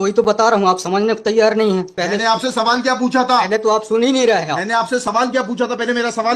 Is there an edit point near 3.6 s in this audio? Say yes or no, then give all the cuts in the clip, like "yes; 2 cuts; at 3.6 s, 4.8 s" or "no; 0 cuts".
no; 1 cut; at 1.9 s